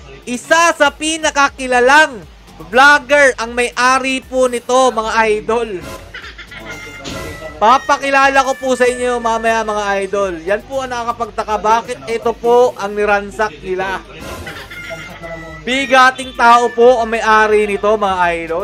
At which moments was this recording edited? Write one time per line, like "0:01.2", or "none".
none